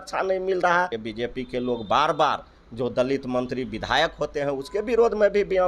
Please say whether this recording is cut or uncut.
cut